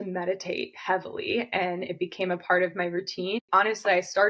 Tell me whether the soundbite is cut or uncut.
cut